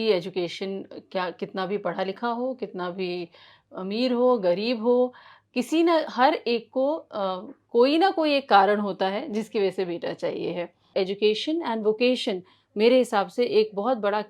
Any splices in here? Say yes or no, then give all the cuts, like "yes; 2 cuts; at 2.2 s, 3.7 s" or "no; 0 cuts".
yes; 1 cut; at 10.8 s